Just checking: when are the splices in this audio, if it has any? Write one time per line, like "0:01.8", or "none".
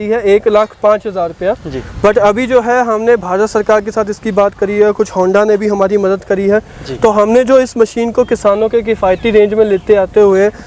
none